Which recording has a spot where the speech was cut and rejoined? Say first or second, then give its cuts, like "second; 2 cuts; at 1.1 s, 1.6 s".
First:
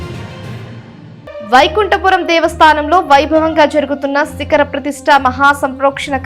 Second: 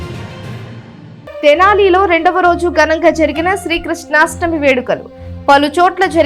first; 1 cut; at 1.4 s